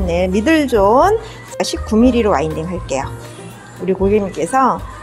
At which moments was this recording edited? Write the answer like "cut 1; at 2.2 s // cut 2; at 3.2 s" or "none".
cut 1; at 1.6 s